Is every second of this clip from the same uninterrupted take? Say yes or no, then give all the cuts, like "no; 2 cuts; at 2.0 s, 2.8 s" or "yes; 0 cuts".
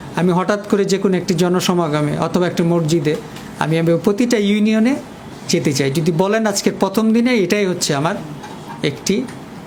yes; 0 cuts